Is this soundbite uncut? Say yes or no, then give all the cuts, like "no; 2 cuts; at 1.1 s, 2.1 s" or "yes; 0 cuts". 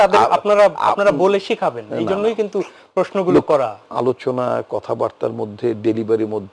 no; 1 cut; at 3.8 s